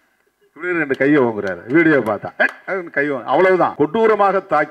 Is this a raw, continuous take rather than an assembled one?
no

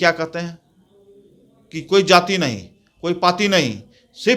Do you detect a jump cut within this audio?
no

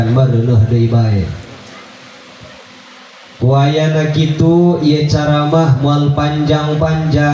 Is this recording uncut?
yes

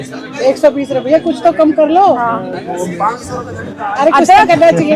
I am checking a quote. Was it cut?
no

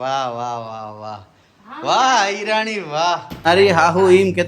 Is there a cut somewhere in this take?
yes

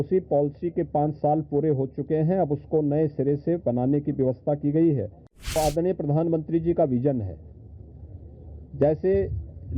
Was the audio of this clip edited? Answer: yes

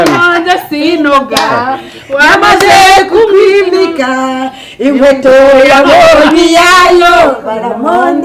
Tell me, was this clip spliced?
no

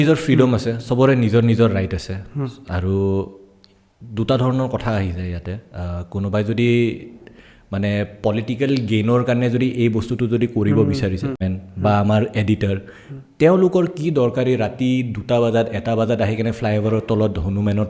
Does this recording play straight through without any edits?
no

